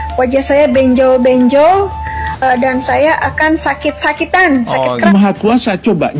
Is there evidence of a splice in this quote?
yes; 1 cut; at 5.1 s

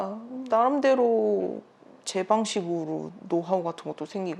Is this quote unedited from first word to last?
yes; 0 cuts

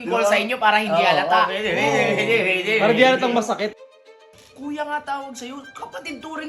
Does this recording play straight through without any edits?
no; 1 cut; at 3.8 s

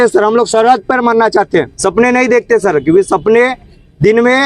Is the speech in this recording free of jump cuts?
no; 1 cut; at 1.7 s

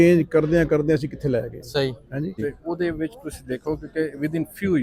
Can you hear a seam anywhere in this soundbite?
yes; 1 cut; at 2.4 s

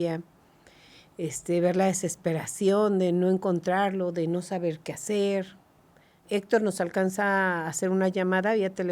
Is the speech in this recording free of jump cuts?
no; 1 cut; at 6.3 s

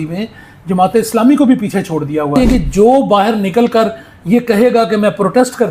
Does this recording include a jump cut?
yes; 1 cut; at 2.3 s

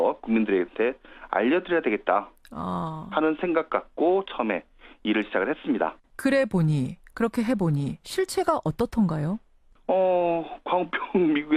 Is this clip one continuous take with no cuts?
yes; 0 cuts

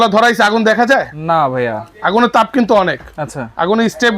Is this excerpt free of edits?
yes; 0 cuts

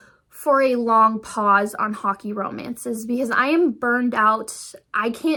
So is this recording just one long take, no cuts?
yes; 0 cuts

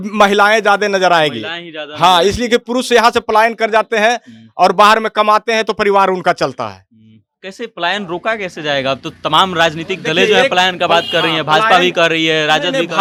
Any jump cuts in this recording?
no; 0 cuts

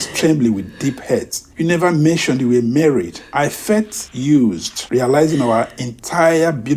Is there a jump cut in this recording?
yes; 3 cuts; at 1.4 s, 3.2 s, 4.0 s

